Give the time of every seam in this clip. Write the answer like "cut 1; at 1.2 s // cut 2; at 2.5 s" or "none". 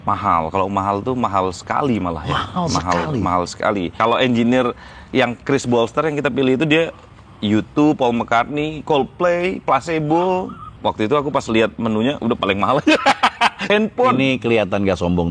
cut 1; at 3.9 s // cut 2; at 10.6 s // cut 3; at 13.6 s